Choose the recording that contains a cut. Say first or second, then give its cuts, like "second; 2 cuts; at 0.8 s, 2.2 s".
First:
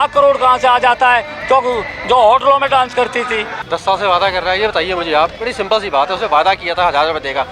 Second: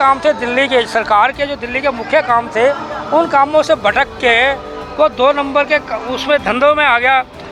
first; 1 cut; at 3.5 s